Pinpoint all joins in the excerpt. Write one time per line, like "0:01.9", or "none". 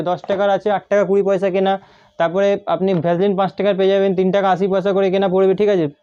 none